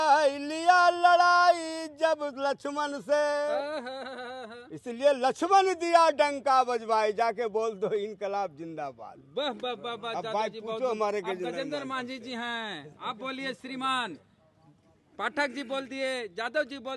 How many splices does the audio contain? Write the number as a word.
zero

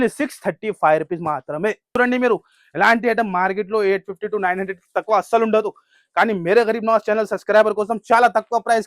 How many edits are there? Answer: one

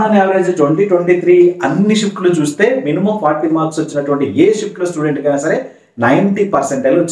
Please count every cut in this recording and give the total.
zero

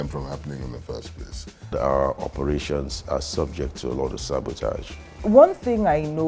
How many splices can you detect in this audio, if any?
two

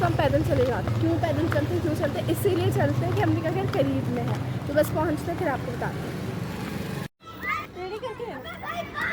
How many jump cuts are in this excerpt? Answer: two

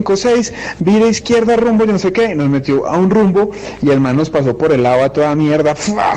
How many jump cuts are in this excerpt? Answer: one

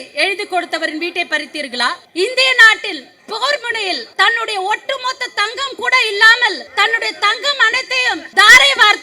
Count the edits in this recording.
four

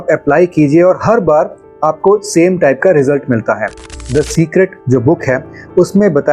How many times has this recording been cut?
one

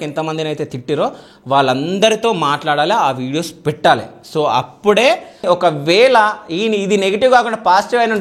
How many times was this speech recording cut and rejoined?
one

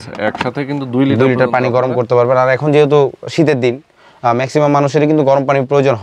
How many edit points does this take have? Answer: zero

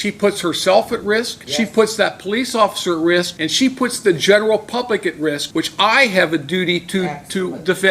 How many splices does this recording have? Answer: three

